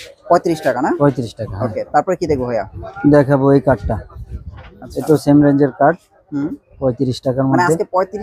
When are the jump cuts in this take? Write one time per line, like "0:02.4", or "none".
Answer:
0:02.8